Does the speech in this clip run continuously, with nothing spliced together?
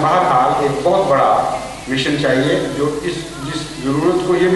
yes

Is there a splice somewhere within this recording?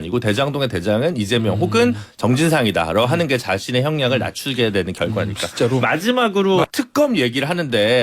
yes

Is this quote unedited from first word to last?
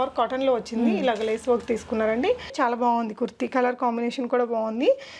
no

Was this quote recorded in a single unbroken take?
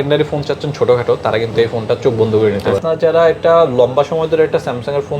no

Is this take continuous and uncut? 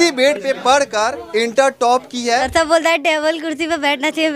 no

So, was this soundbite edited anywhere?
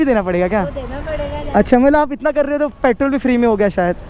no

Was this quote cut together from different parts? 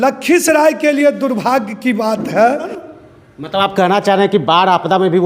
yes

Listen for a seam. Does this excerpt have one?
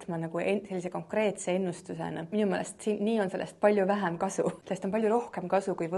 yes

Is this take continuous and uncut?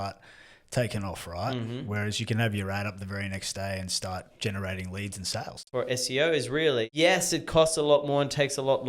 no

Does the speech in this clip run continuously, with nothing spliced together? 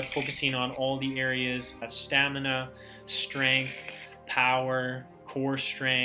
no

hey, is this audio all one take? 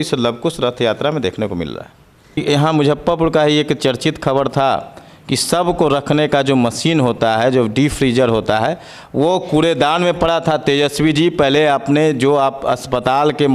no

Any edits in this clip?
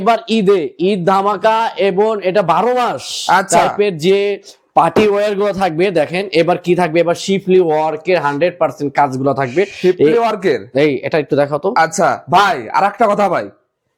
no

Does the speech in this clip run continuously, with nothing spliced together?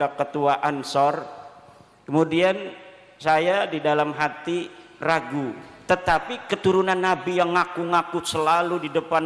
no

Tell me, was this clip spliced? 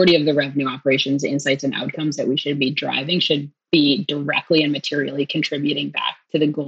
yes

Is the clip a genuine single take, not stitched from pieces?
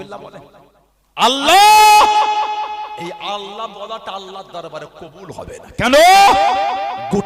no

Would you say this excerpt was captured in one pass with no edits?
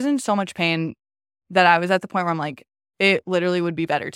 yes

